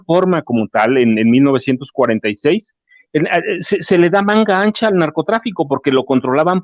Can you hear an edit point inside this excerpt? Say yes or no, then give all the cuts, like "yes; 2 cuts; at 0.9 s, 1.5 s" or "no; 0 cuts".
no; 0 cuts